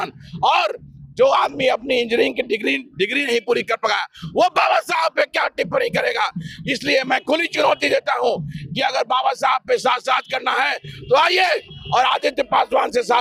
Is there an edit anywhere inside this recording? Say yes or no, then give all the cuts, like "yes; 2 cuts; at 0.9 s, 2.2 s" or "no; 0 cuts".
no; 0 cuts